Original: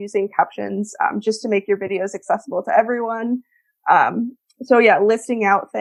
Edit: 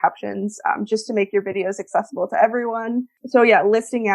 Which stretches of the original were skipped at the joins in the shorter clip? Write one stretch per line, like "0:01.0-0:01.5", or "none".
0:03.5-0:04.5